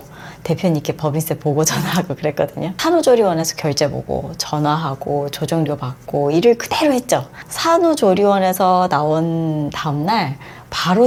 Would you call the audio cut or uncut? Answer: uncut